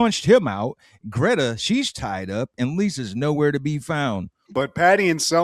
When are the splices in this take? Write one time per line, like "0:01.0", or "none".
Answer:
0:04.3